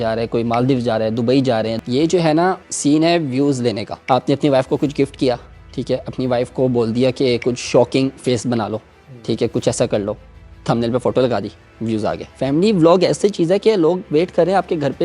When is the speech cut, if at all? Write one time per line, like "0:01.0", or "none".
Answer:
0:01.8
0:02.7
0:03.9
0:12.3